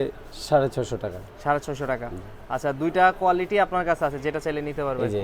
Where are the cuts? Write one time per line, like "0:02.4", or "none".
none